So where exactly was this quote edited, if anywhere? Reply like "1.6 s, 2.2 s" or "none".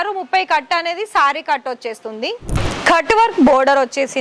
2.7 s